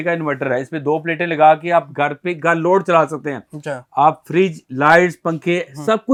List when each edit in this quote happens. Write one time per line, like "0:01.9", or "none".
none